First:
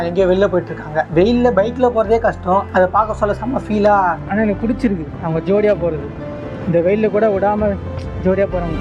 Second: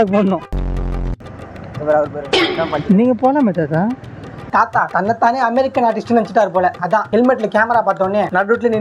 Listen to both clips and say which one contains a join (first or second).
first